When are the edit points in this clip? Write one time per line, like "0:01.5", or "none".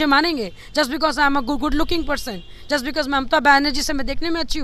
none